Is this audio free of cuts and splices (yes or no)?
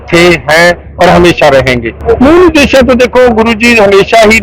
no